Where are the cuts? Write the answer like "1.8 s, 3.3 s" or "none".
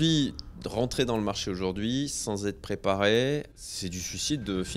3.5 s